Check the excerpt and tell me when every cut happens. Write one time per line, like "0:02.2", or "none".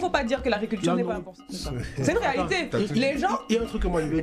0:01.6